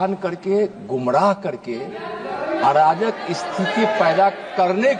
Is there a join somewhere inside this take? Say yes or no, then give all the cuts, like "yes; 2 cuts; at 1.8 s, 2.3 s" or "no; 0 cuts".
no; 0 cuts